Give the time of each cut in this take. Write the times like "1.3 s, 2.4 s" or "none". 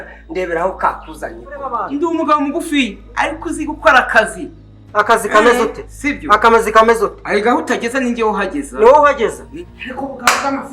1.8 s, 9.5 s